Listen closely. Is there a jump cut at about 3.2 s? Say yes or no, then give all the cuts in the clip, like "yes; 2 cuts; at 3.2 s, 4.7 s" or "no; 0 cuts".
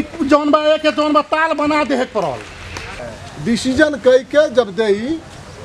yes; 1 cut; at 3.2 s